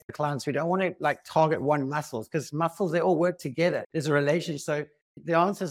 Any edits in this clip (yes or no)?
no